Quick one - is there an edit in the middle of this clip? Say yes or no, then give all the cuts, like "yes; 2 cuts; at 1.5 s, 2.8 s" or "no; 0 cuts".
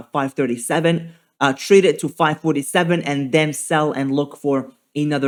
no; 0 cuts